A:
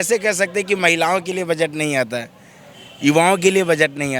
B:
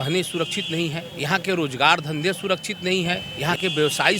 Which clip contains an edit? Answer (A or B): B